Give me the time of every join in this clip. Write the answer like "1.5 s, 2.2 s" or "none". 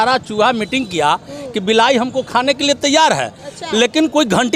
none